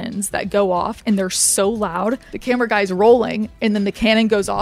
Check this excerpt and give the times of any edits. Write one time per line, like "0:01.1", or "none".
0:02.3